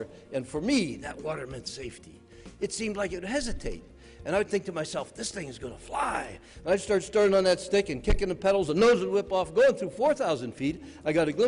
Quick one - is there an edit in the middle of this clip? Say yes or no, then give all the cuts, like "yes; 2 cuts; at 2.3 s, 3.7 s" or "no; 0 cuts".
yes; 1 cut; at 9.7 s